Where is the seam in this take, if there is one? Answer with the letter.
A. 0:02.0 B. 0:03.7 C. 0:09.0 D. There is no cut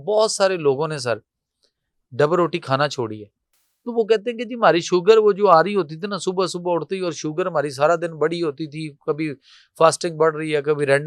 D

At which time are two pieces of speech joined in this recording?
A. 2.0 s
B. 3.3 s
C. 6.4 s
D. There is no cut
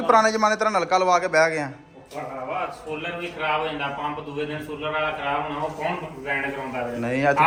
D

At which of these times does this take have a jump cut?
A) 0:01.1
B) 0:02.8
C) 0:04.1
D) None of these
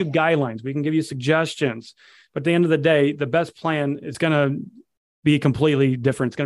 C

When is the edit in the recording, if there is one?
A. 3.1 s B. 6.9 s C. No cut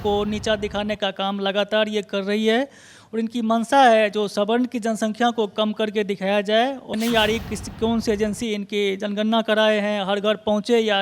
B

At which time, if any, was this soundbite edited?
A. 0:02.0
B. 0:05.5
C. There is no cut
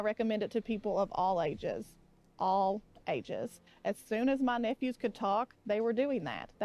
B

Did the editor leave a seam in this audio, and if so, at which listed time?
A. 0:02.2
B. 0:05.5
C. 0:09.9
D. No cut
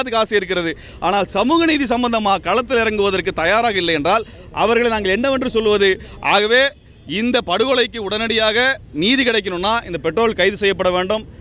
D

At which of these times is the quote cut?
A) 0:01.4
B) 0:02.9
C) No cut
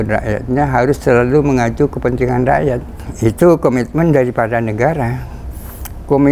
C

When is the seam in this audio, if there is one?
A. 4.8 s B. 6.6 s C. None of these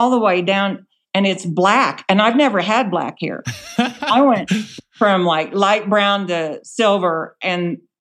A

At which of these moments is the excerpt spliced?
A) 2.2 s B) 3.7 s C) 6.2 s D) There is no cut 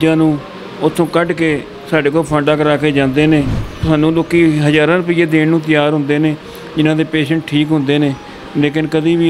B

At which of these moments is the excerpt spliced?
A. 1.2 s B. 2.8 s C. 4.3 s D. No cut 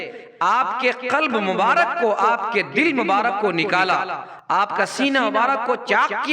D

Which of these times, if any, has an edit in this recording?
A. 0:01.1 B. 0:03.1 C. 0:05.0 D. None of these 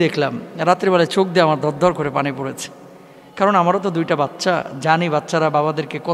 D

